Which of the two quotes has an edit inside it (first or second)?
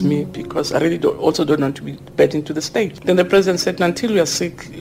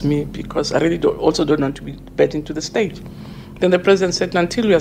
first